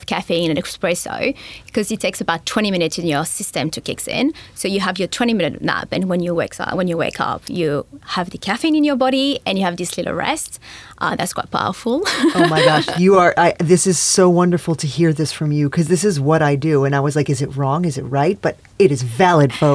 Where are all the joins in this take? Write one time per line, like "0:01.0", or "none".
none